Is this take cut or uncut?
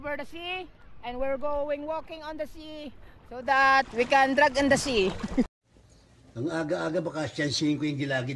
cut